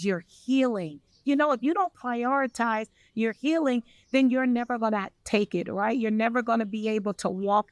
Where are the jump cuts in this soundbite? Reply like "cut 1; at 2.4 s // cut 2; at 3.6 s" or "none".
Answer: none

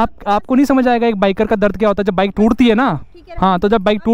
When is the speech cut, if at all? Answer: none

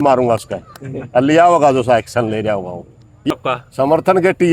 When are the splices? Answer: cut 1; at 3.3 s

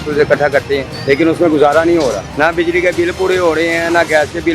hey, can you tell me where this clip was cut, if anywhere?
cut 1; at 0.9 s // cut 2; at 2.3 s

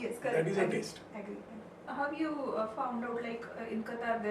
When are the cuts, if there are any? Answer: cut 1; at 1.9 s

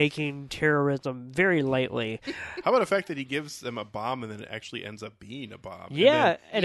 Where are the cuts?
none

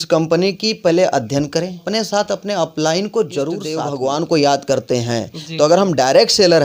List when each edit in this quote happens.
cut 1; at 1.8 s // cut 2; at 3.9 s

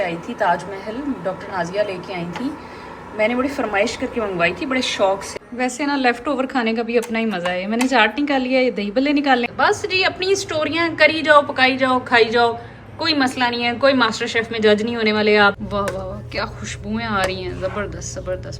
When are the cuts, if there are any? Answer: cut 1; at 5.3 s // cut 2; at 9.5 s // cut 3; at 15.6 s

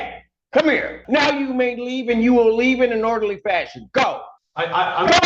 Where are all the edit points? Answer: cut 1; at 0.9 s

